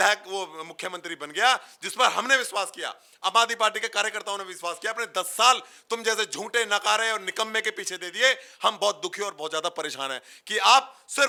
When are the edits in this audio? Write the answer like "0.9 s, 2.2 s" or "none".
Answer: none